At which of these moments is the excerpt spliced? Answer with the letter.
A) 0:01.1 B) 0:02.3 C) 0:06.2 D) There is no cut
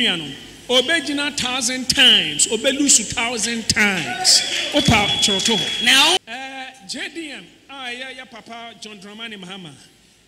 C